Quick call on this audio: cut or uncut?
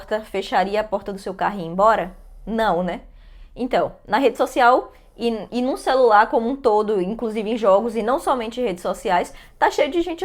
uncut